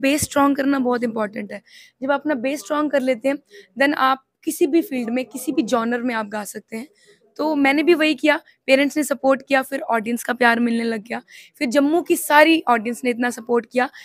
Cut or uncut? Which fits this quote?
uncut